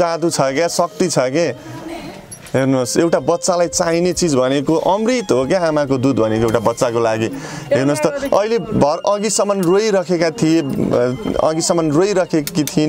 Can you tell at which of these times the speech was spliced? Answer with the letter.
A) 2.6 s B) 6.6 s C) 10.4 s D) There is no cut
D